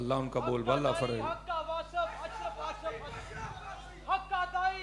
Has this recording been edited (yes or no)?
no